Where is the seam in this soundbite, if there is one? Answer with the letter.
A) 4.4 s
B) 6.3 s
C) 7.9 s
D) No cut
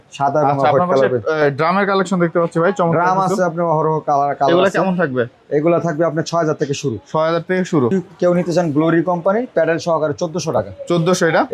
C